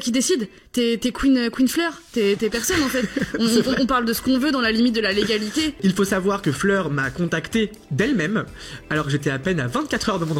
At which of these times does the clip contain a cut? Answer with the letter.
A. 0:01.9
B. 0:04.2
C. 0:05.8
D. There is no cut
C